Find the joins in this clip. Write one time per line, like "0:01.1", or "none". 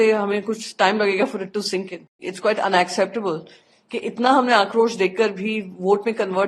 0:02.3